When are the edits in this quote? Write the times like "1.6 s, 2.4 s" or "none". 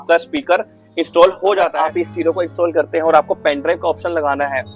1.7 s